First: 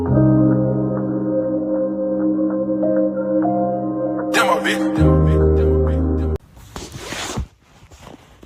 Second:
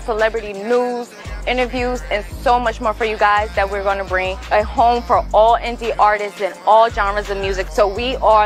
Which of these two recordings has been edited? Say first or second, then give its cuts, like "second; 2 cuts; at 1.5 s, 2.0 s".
first; 1 cut; at 6.4 s